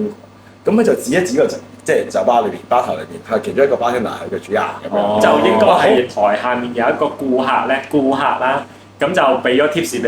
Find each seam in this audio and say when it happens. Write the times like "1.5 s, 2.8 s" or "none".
6.0 s